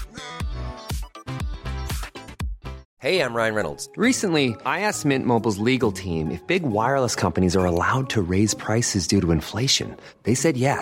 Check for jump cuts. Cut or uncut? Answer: cut